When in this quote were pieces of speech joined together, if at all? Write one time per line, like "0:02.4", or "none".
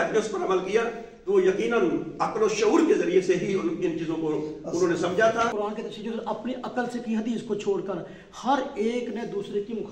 0:05.5

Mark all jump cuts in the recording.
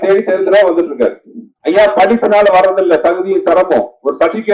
0:01.5

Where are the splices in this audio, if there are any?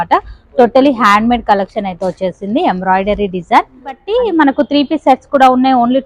0:04.1

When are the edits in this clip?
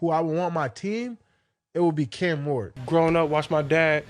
0:02.7

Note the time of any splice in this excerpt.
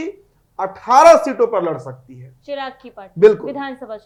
none

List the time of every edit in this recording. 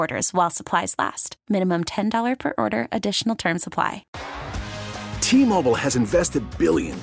0:04.1

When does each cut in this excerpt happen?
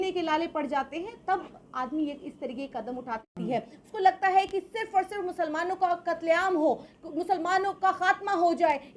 0:03.3

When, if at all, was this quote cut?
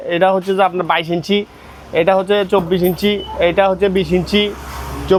none

